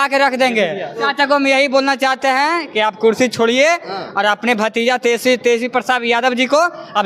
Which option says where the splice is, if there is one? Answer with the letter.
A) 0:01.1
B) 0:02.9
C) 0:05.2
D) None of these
A